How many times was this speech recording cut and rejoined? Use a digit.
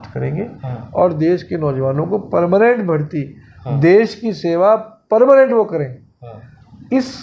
0